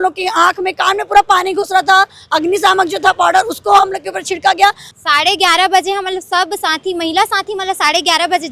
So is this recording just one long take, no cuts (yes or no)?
no